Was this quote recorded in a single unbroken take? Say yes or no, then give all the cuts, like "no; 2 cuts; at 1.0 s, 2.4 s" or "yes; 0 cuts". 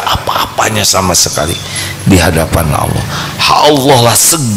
yes; 0 cuts